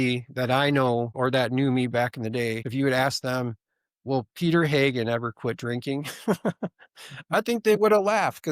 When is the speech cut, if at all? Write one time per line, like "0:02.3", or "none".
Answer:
0:01.1
0:02.6